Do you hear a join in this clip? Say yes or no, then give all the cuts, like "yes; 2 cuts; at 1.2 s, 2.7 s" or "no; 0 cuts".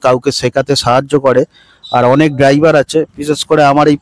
no; 0 cuts